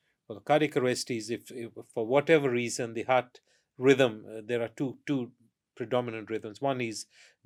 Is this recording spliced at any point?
no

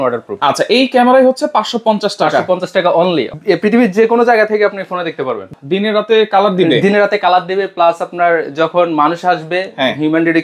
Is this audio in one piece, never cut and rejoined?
no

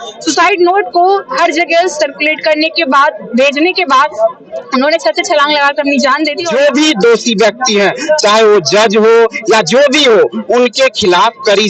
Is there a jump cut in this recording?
yes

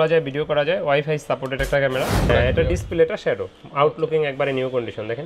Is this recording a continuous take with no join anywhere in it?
no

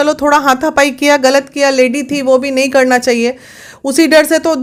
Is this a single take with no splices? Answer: yes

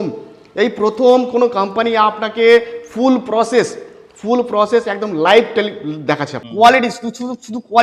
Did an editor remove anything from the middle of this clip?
yes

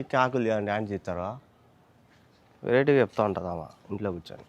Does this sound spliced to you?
no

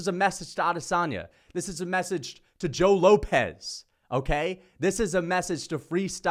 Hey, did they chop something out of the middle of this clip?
no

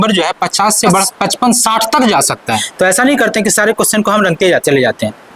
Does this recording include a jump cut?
yes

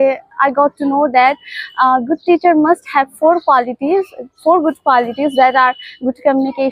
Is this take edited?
no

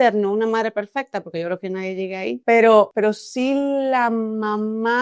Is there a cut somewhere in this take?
yes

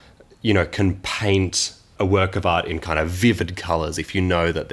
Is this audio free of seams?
no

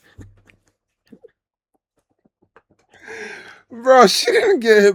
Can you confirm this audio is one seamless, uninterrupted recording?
yes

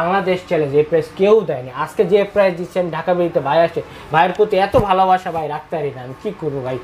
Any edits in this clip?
no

